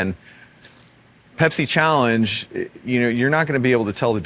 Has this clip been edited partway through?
no; 0 cuts

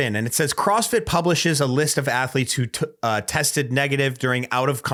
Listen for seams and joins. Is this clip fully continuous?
yes; 0 cuts

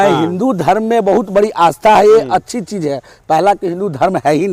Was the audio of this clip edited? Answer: no; 0 cuts

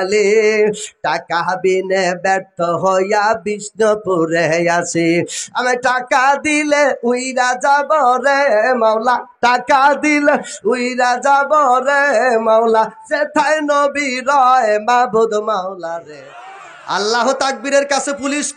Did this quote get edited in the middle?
yes; 1 cut; at 16.1 s

